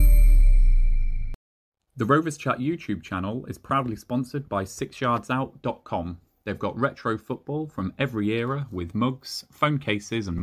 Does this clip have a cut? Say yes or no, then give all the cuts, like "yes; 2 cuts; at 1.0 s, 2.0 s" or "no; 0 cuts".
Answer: yes; 1 cut; at 2.0 s